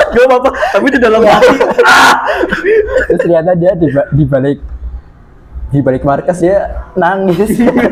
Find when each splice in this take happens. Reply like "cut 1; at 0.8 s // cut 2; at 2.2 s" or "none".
none